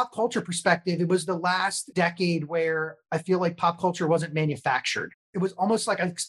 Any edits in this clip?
yes; 2 cuts; at 1.8 s, 5.2 s

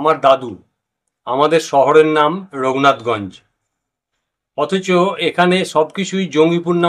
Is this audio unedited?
yes; 0 cuts

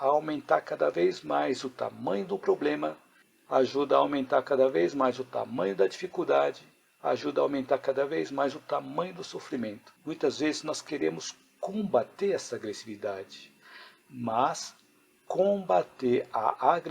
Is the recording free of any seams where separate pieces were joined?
no; 1 cut; at 10.0 s

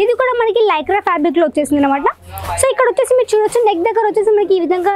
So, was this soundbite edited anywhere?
no; 0 cuts

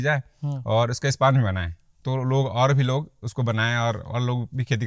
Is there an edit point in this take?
no; 0 cuts

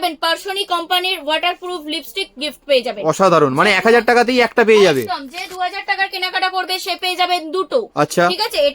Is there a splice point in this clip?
no; 0 cuts

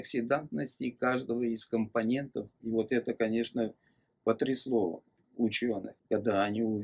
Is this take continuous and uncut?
no; 2 cuts; at 2.5 s, 5.9 s

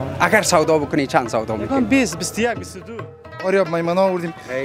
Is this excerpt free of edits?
no; 1 cut; at 3.5 s

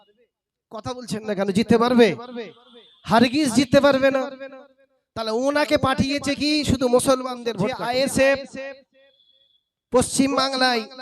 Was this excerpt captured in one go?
no; 1 cut; at 7.5 s

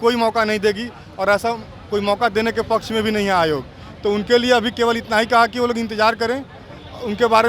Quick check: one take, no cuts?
yes; 0 cuts

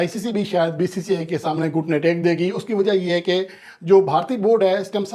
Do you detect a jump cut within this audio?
no; 0 cuts

